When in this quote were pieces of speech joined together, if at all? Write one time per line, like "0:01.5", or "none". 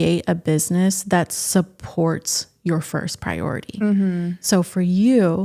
none